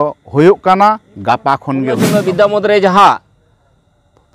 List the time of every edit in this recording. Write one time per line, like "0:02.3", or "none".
0:02.0